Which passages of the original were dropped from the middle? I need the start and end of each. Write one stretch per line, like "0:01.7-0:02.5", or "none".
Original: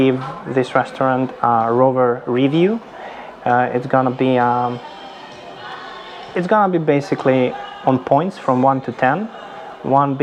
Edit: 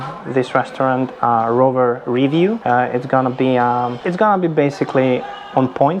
0:02.8-0:03.4
0:04.8-0:06.3